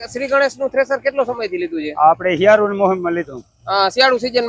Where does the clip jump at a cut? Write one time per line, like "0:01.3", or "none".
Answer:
none